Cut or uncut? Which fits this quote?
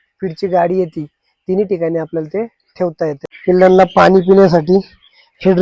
cut